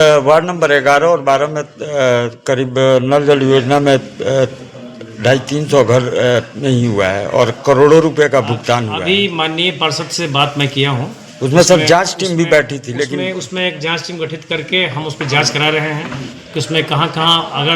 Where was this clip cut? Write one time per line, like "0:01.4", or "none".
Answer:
none